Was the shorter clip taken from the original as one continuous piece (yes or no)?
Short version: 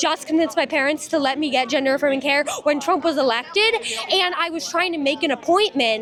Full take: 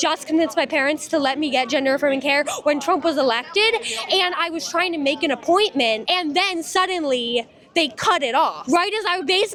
yes